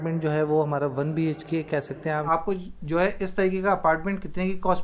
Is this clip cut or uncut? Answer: cut